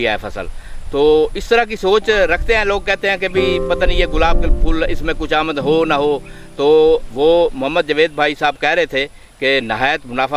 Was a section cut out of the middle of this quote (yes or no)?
no